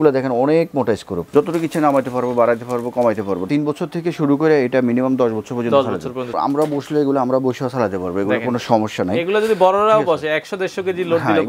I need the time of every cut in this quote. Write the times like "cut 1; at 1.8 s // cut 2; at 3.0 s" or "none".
cut 1; at 1.2 s // cut 2; at 3.5 s // cut 3; at 6.3 s